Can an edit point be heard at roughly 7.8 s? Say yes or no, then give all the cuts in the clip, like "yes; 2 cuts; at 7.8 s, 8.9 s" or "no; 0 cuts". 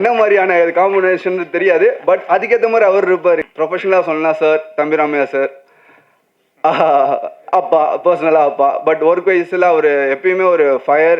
no; 1 cut; at 3.4 s